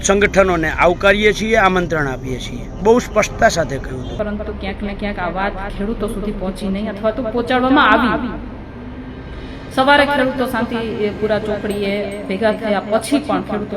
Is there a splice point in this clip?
yes; 1 cut; at 4.1 s

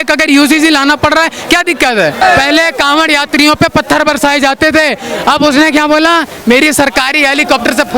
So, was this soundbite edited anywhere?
yes; 1 cut; at 2.2 s

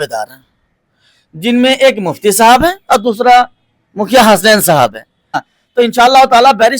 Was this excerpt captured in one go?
no; 1 cut; at 5.6 s

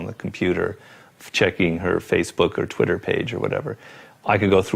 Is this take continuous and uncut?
no; 1 cut; at 3.8 s

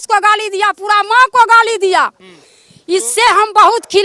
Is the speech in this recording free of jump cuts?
yes; 0 cuts

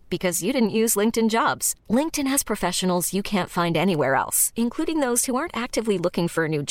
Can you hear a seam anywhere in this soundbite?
no; 0 cuts

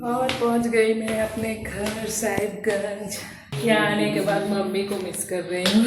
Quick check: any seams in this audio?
yes; 1 cut; at 3.5 s

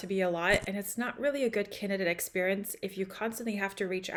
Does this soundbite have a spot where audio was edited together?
no; 0 cuts

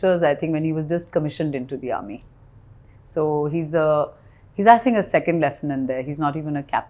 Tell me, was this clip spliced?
no; 0 cuts

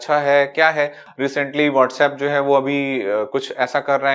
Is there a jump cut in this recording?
yes; 1 cut; at 1.0 s

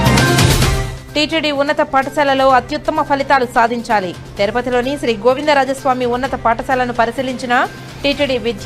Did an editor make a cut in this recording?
no; 0 cuts

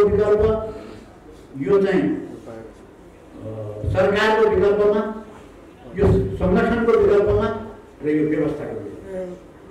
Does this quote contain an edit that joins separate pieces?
no; 0 cuts

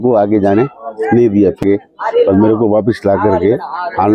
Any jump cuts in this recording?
yes; 1 cut; at 1.6 s

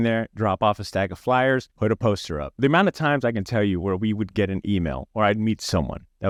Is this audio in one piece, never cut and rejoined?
yes; 0 cuts

